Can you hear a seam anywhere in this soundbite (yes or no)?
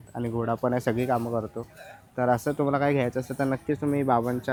no